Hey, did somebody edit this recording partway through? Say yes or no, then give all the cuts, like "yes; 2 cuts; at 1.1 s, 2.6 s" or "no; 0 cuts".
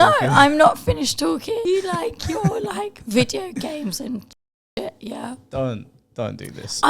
yes; 1 cut; at 1.6 s